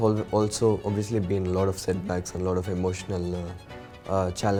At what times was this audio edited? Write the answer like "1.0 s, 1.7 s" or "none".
none